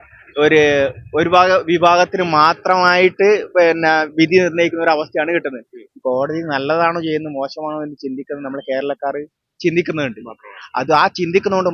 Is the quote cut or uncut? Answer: uncut